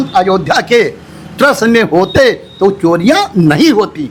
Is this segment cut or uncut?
uncut